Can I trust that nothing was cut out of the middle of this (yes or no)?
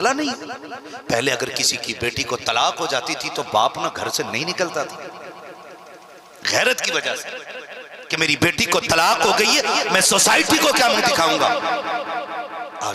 yes